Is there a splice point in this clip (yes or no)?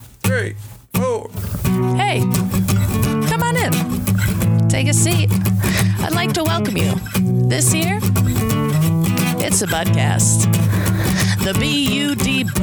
no